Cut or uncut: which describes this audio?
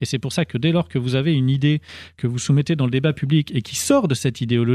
uncut